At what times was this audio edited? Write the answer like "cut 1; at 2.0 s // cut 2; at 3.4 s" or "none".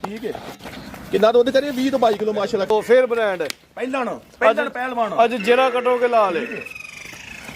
cut 1; at 2.7 s